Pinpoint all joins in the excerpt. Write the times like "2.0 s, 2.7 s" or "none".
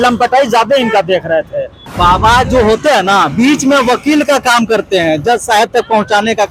none